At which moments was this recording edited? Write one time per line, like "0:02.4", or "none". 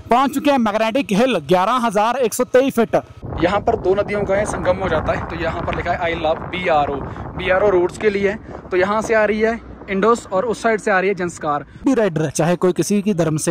0:03.2
0:11.8

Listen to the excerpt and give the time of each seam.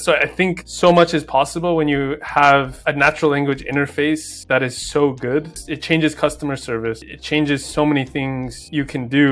none

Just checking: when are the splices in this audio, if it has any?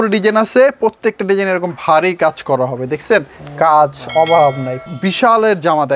0:03.4
0:04.9

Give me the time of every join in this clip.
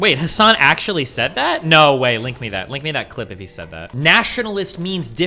0:03.9

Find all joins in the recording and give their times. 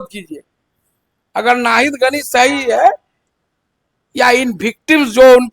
none

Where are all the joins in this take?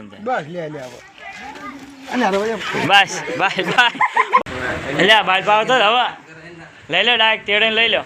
0:04.4

